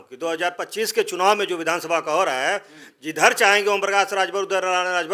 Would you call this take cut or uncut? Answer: uncut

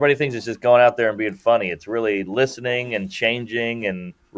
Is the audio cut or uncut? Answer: uncut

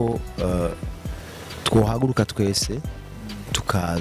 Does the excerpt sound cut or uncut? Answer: uncut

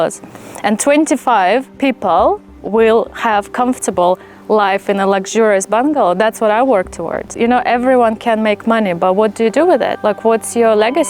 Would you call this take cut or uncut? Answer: cut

